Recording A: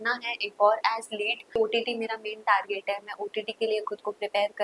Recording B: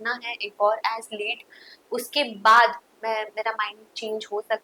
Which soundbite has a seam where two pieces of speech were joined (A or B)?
A